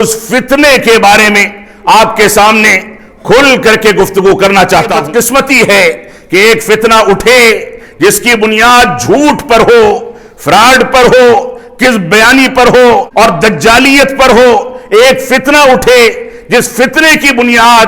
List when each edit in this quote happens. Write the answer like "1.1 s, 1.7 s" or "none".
5.0 s, 13.1 s